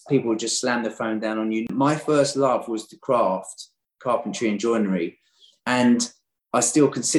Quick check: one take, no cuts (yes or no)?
no